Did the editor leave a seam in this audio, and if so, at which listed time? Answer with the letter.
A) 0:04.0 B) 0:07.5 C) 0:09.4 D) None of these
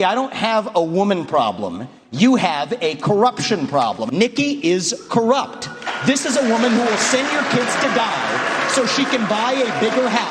A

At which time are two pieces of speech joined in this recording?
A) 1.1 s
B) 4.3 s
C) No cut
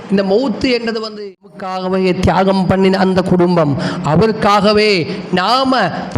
A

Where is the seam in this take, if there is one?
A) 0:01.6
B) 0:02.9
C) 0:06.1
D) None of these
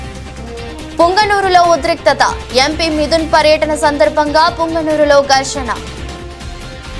C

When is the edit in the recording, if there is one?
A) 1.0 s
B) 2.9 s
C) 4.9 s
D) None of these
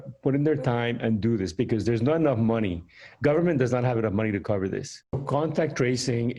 C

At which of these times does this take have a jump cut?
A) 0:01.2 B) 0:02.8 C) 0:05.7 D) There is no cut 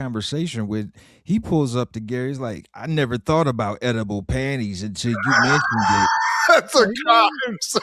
D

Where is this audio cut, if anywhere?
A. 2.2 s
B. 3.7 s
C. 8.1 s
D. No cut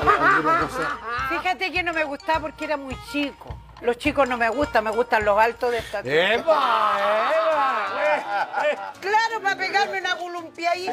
B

